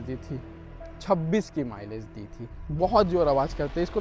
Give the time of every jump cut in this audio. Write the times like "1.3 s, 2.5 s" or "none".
2.5 s